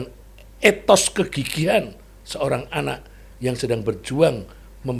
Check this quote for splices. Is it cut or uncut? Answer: uncut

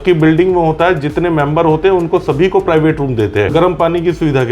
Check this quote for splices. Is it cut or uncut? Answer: cut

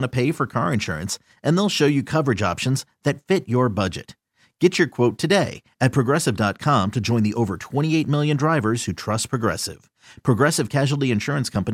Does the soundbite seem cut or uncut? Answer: uncut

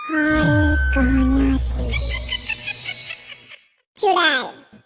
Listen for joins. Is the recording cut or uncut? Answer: cut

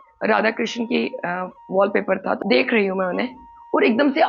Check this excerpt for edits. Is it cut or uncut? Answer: cut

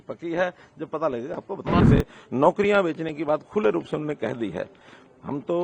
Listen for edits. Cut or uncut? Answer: cut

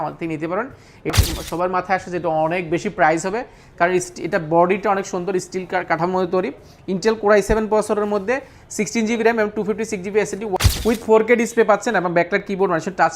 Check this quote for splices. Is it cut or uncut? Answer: cut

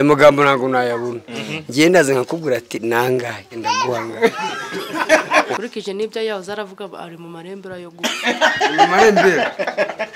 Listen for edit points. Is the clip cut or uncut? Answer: cut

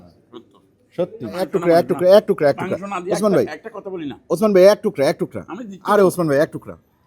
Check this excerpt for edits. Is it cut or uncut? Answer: cut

